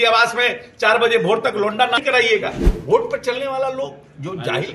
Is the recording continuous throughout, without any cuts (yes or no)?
no